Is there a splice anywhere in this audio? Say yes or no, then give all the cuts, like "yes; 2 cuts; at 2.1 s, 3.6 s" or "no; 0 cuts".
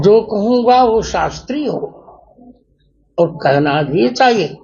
no; 0 cuts